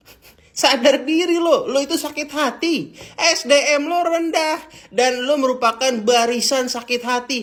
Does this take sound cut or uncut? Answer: uncut